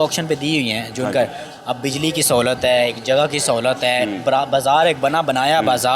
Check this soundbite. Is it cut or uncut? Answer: uncut